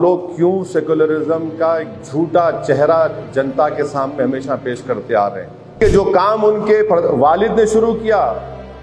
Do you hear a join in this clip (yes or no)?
yes